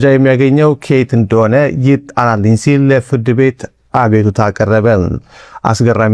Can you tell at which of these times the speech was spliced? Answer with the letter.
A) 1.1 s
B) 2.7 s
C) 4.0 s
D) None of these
D